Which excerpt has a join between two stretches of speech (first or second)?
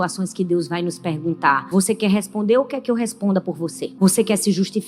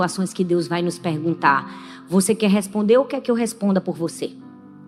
first